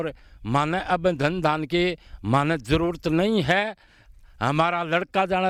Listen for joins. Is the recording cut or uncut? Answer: uncut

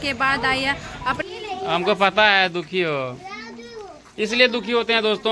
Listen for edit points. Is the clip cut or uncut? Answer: cut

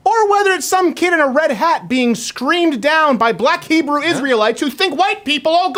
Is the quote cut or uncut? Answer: uncut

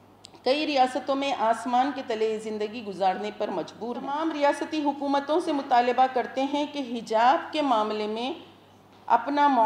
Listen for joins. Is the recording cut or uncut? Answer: cut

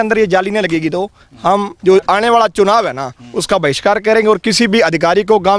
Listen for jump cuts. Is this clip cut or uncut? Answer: uncut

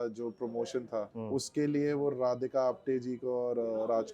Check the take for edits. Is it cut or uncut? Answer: cut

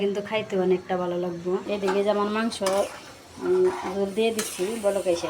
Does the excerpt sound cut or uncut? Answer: uncut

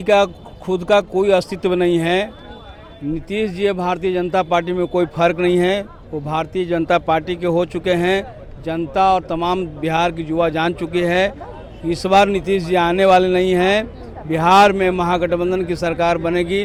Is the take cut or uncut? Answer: uncut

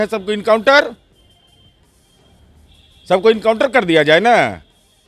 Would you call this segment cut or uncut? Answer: uncut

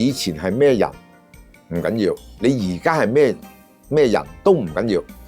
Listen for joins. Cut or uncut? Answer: uncut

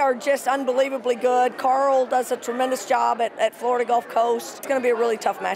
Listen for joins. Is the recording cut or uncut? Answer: cut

